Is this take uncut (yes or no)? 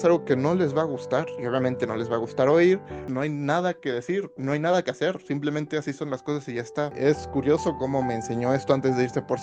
no